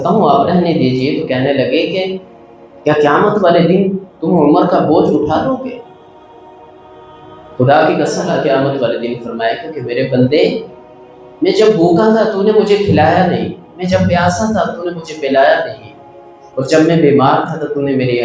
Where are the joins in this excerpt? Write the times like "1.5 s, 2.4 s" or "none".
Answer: 8.3 s